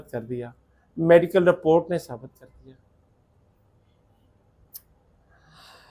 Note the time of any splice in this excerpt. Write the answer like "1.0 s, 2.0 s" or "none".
none